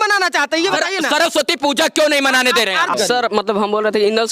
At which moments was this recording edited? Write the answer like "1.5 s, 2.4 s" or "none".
3.0 s

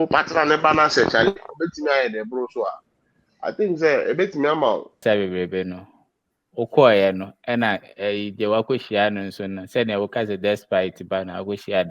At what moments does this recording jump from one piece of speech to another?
5.0 s

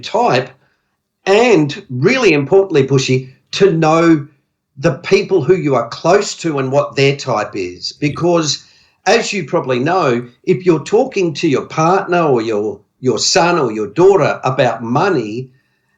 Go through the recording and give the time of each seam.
none

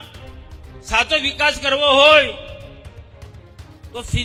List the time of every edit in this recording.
none

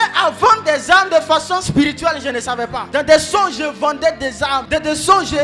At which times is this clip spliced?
2.8 s, 4.6 s

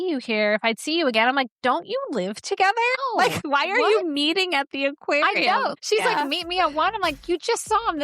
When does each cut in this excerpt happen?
3.4 s, 5.8 s

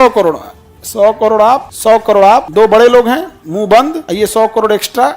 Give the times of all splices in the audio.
1.7 s, 2.5 s, 4.0 s

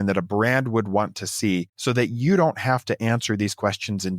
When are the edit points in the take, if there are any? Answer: 1.7 s

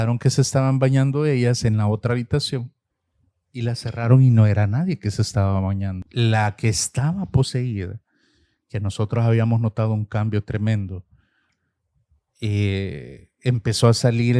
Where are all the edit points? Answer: 6.0 s

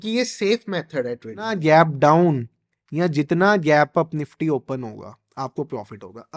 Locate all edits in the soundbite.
1.6 s

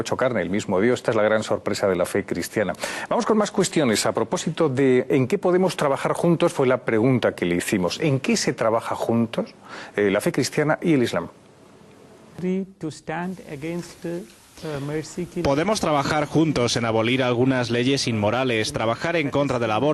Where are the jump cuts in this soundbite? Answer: none

